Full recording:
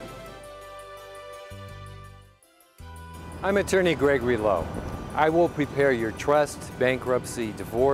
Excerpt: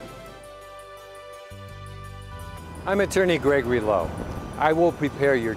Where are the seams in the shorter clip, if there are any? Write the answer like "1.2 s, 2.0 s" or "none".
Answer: 2.3 s